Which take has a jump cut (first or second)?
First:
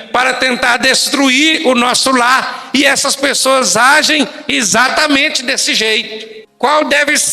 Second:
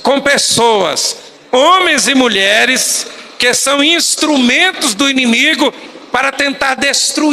first